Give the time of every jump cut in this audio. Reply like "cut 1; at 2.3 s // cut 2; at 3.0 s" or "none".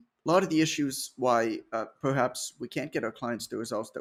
none